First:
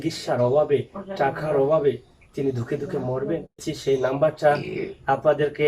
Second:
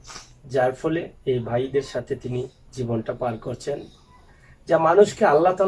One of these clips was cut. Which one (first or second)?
first